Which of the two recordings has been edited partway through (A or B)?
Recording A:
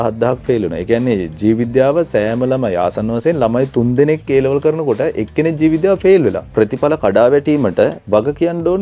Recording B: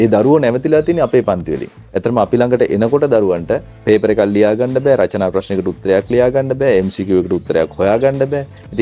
A